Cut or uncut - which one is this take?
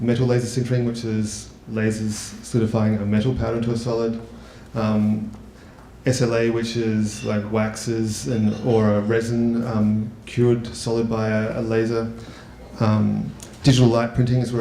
cut